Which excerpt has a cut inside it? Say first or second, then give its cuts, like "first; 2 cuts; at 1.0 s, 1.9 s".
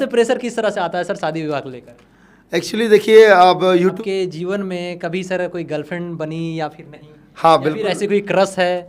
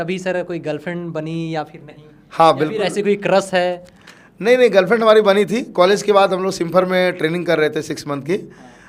first; 1 cut; at 4.0 s